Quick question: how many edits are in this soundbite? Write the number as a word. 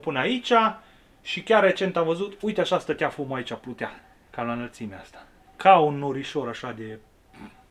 zero